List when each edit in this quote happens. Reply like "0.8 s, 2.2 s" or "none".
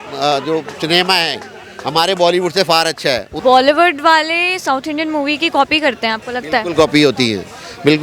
3.3 s